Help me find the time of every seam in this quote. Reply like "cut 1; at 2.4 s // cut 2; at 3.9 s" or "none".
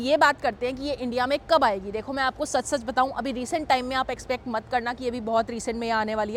none